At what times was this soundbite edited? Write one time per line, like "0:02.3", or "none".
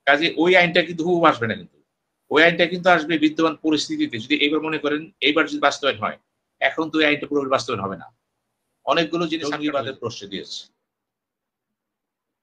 0:09.4